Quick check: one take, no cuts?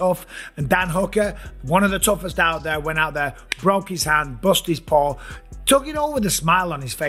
yes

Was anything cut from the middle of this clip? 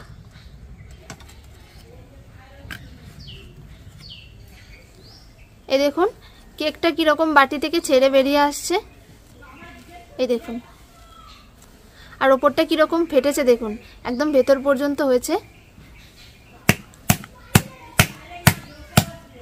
yes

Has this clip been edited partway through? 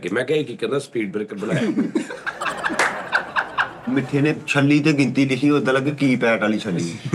yes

